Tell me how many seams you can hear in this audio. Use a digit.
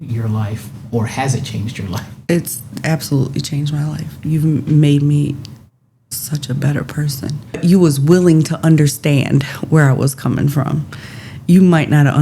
1